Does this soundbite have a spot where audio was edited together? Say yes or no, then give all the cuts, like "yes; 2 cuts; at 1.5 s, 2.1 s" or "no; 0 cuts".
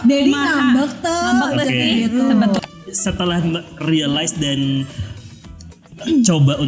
yes; 1 cut; at 2.6 s